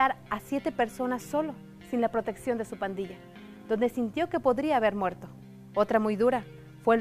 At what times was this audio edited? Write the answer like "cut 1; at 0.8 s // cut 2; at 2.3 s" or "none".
cut 1; at 5.8 s